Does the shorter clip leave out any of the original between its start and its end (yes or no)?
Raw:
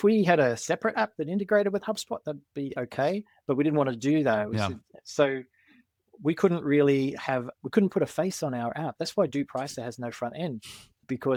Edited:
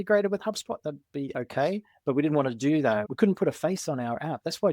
yes